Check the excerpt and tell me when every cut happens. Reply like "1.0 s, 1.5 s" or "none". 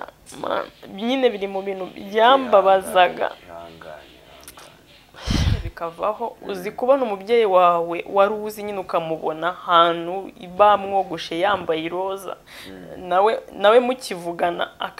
5.7 s